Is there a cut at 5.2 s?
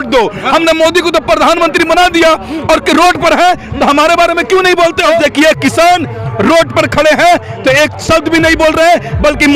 yes; 1 cut; at 5.2 s

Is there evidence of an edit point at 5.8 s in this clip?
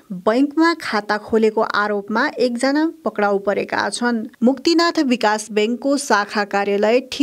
no; 1 cut; at 4.3 s

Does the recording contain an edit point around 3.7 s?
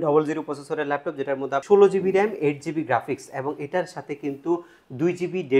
no; 1 cut; at 1.6 s

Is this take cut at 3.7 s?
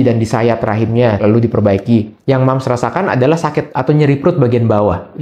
yes; 3 cuts; at 1.2 s, 2.2 s, 3.7 s

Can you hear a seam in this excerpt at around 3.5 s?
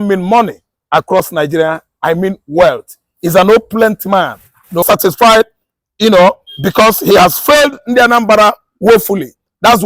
no; 1 cut; at 4.8 s

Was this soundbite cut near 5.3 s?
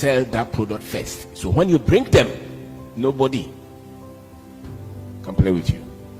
yes; 2 cuts; at 3.6 s, 5.3 s

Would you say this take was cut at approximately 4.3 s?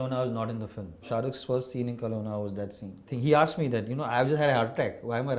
no; 2 cuts; at 1.1 s, 3.1 s

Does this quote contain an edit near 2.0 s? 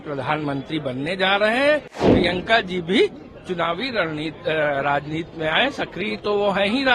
yes; 1 cut; at 2.0 s

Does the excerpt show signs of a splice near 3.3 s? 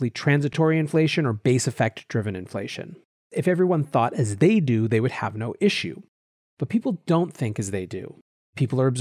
yes; 1 cut; at 3.3 s

